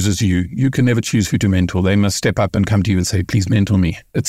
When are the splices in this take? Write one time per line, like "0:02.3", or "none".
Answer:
none